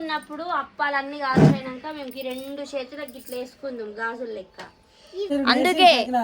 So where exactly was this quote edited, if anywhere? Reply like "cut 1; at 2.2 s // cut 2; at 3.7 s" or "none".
cut 1; at 5.3 s

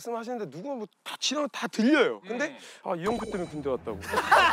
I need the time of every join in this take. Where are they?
none

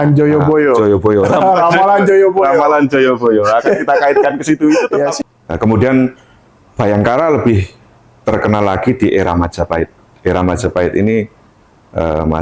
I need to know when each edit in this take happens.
cut 1; at 5.2 s

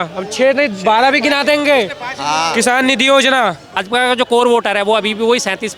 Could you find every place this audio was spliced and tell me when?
cut 1; at 3.7 s

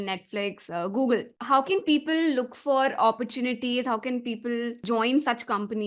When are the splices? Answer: cut 1; at 1.3 s // cut 2; at 4.8 s

